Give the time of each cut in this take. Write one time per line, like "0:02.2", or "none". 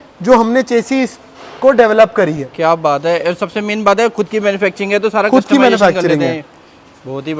none